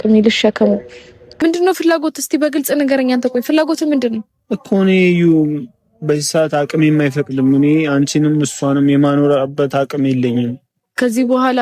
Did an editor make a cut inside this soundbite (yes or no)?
yes